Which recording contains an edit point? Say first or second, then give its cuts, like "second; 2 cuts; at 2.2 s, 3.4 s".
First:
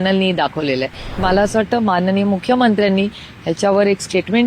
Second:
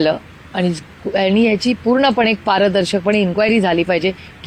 first; 1 cut; at 1.2 s